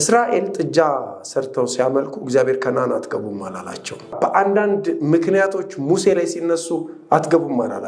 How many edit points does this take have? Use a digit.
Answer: 1